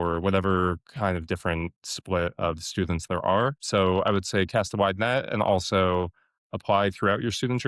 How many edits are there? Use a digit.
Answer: 1